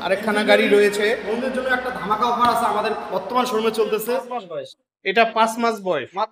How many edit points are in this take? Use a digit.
1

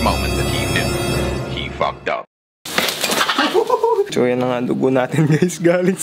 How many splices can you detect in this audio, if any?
1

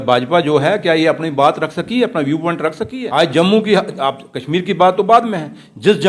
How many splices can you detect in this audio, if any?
1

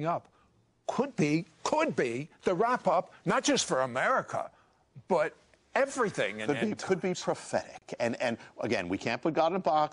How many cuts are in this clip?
0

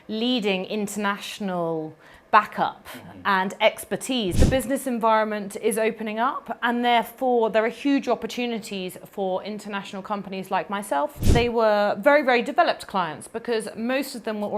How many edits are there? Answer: 2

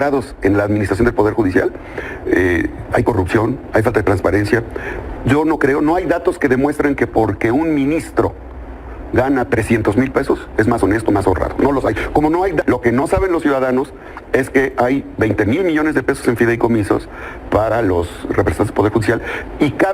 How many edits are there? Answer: 1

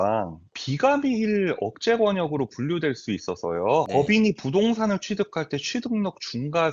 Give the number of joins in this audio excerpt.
1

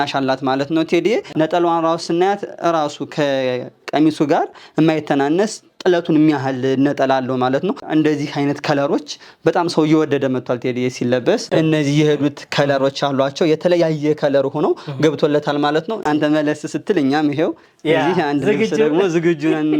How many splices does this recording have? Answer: 4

